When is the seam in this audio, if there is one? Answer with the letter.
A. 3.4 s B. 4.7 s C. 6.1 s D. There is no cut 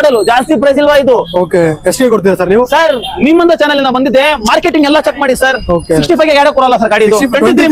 D